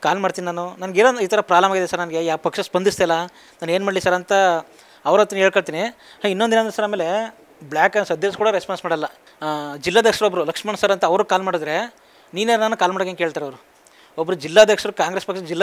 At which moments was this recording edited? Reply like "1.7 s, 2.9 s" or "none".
none